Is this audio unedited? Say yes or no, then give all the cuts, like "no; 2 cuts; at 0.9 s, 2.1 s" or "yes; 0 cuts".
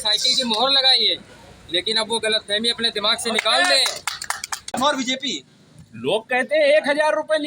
no; 1 cut; at 4.7 s